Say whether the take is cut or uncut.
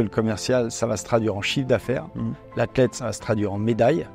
uncut